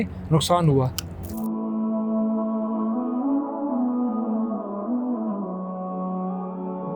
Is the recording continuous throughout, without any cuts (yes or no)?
no